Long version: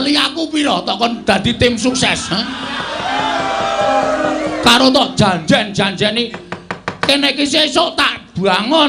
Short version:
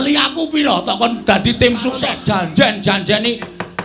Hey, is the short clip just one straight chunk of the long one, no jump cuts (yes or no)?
no